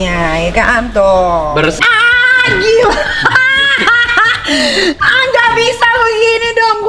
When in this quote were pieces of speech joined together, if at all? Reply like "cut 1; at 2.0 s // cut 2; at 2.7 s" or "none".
cut 1; at 1.8 s